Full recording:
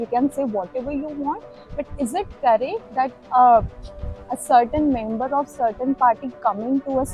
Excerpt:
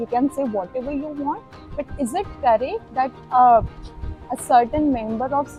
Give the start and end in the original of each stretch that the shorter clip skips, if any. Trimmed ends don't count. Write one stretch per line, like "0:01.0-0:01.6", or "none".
none